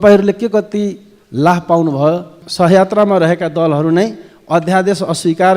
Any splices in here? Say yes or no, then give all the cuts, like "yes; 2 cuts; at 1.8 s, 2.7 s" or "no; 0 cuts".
yes; 1 cut; at 2.4 s